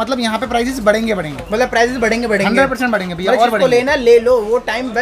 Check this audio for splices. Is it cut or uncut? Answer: uncut